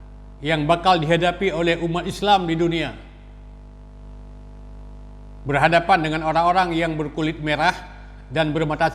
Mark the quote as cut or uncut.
uncut